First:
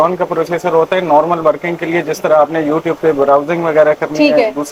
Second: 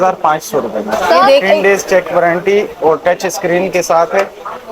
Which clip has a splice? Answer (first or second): second